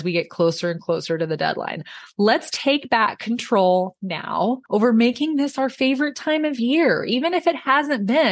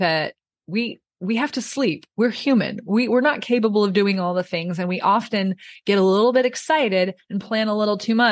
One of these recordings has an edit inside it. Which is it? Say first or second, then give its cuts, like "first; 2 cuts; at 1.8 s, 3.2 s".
first; 1 cut; at 4.6 s